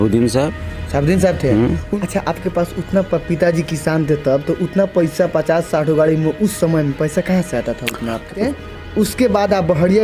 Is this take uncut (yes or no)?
no